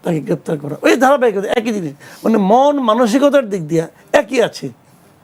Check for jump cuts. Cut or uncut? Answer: uncut